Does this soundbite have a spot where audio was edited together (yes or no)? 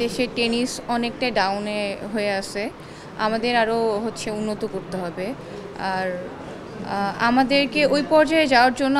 no